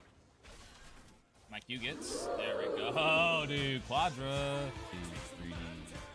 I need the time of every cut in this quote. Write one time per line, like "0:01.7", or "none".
none